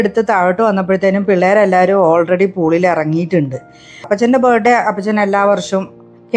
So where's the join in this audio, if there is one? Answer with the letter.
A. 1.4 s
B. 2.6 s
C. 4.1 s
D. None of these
C